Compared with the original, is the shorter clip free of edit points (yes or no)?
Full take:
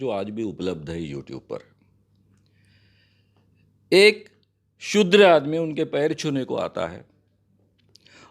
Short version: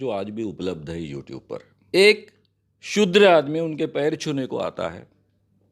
no